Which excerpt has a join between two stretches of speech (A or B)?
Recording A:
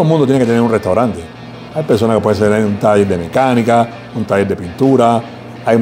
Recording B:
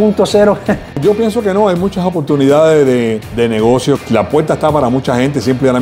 B